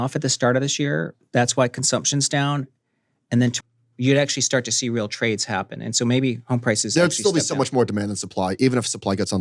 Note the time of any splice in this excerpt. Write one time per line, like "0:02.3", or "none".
0:03.6